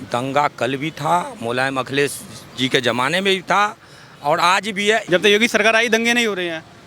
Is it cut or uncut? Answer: uncut